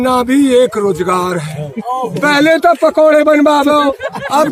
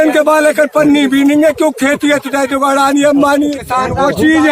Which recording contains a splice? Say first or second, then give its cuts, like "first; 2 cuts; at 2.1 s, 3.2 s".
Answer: second; 1 cut; at 3.6 s